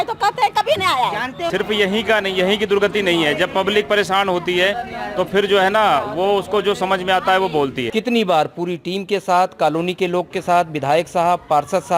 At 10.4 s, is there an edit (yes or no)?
no